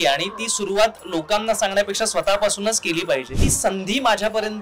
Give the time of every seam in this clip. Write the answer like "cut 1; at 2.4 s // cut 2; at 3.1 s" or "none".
cut 1; at 3.5 s